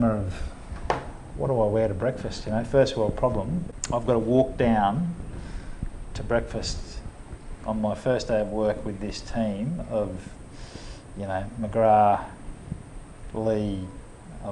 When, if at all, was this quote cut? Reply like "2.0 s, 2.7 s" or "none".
3.7 s